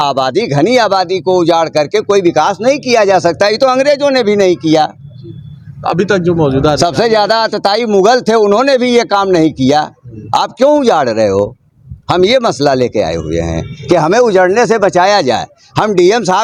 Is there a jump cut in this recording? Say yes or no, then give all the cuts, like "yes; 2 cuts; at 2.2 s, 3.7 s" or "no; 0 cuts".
no; 0 cuts